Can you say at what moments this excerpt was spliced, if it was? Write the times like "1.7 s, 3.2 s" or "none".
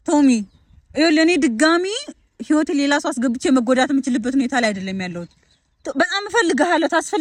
none